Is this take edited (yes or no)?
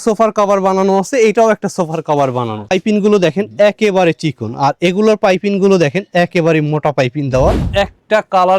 yes